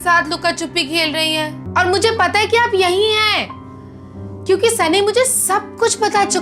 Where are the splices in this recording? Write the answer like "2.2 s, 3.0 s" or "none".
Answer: 1.6 s